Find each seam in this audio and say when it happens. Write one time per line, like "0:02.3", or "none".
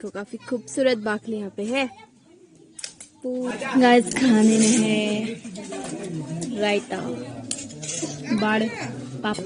0:03.5